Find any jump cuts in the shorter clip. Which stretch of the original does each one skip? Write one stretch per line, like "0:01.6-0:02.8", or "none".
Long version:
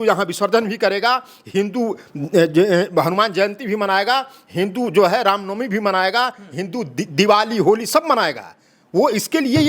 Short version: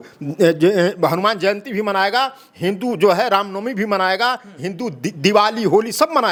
none